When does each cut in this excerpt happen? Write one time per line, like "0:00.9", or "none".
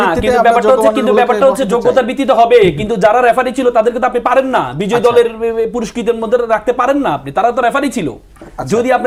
none